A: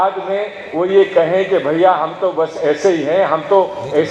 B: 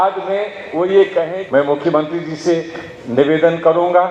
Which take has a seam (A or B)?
B